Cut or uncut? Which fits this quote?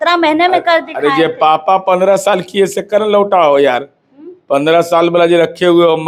uncut